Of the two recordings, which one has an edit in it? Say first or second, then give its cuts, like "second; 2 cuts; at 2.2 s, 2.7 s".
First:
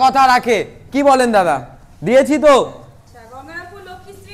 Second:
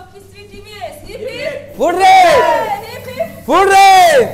first; 1 cut; at 3.0 s